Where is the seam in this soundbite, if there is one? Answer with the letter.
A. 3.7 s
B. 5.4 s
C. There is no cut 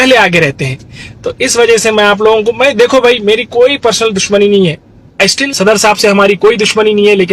B